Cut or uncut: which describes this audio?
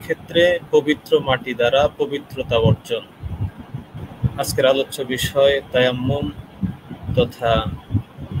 cut